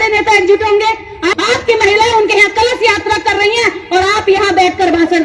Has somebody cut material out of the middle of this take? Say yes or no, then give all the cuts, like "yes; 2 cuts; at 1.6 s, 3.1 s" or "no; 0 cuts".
yes; 1 cut; at 1.4 s